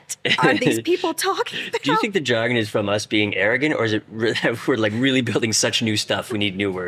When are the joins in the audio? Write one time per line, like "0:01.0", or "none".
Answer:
none